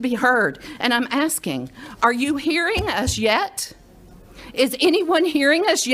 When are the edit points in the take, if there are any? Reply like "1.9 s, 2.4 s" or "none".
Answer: none